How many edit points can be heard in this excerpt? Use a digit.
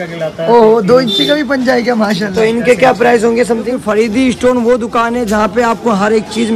2